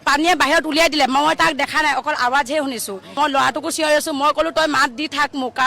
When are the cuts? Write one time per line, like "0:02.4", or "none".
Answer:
0:03.1